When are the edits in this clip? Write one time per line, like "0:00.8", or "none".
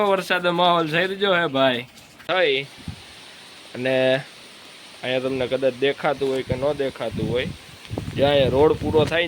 0:02.3

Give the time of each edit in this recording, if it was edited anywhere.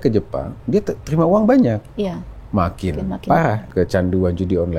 0:03.7

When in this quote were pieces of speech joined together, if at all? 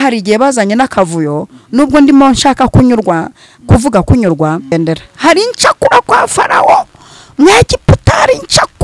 0:04.7

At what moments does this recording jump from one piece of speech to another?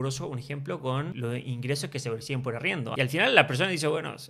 0:01.1
0:02.9

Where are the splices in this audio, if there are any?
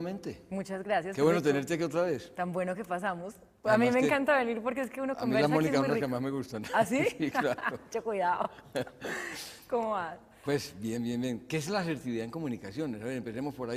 none

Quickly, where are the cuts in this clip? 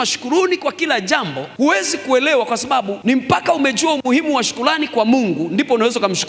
0:01.4
0:02.9

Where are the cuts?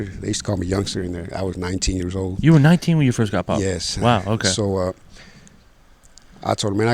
none

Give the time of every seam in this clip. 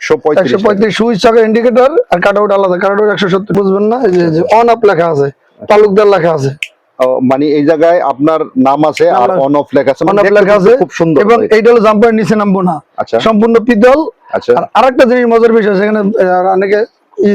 0:03.5

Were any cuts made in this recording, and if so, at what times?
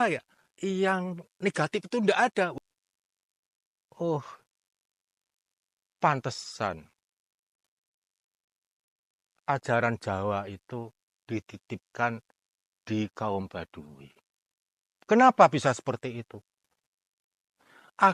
0:02.5

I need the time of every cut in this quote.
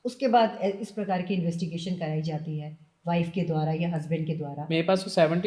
none

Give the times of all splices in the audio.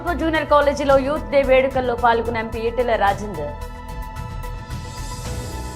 0:03.5

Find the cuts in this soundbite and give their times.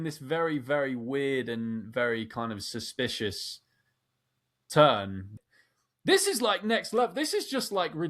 0:05.2

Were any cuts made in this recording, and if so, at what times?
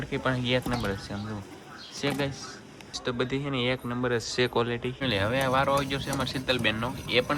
none

